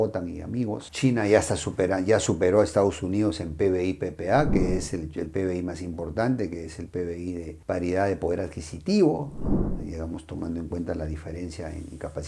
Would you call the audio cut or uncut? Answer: uncut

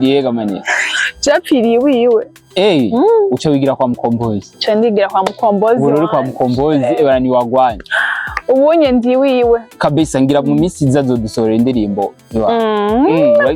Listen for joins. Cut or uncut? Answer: uncut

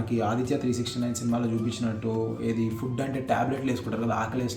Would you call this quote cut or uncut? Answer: uncut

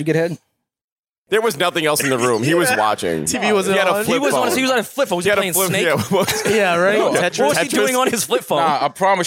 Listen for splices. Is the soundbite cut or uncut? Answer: cut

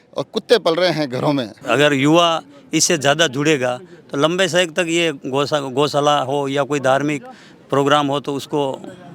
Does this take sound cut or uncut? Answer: cut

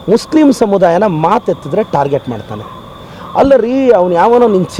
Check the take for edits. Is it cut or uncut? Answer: uncut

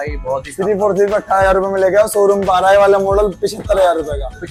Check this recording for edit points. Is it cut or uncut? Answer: uncut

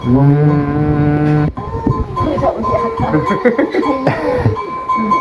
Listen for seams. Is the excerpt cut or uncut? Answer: cut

